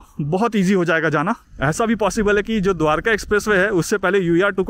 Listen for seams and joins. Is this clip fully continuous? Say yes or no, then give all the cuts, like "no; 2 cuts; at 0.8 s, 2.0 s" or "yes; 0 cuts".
no; 1 cut; at 1.5 s